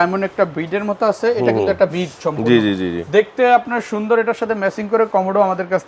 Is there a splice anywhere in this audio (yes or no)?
no